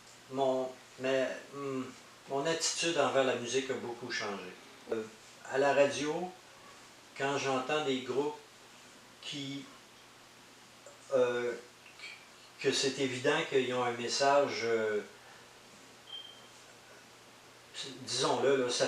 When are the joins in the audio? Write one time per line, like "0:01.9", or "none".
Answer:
0:04.9